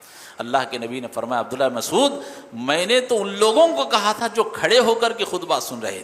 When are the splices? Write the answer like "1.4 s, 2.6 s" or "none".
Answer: none